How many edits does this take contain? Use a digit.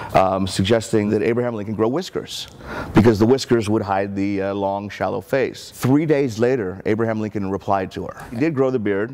3